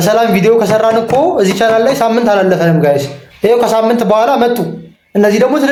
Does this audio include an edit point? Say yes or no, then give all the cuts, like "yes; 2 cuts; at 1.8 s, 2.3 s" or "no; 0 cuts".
no; 0 cuts